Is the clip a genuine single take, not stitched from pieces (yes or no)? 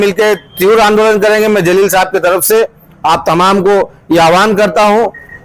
yes